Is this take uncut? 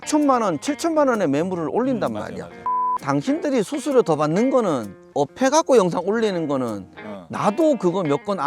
no; 2 cuts; at 2.6 s, 4.9 s

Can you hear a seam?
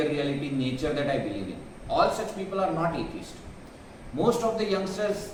no; 0 cuts

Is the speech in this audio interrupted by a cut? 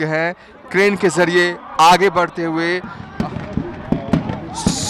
yes; 1 cut; at 3.1 s

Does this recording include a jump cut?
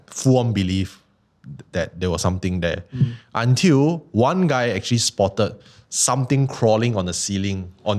no; 0 cuts

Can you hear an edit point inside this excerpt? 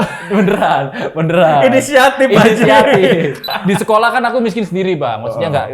yes; 1 cut; at 3.5 s

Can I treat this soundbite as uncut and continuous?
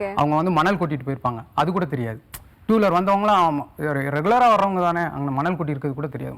yes; 0 cuts

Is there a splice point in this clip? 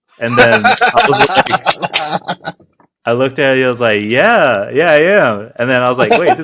no; 0 cuts

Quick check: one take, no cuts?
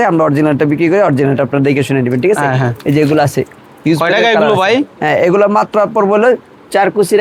yes; 0 cuts

